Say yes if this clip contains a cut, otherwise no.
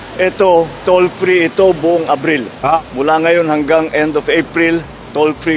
no